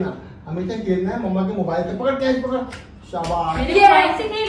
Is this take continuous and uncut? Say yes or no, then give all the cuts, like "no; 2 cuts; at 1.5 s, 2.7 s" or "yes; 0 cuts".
yes; 0 cuts